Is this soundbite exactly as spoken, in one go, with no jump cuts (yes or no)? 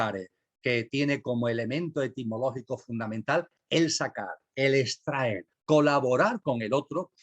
no